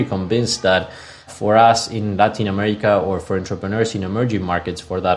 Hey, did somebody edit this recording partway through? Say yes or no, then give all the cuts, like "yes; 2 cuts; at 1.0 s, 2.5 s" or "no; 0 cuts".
yes; 1 cut; at 1.3 s